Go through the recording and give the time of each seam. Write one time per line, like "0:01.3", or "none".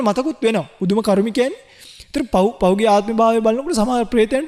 none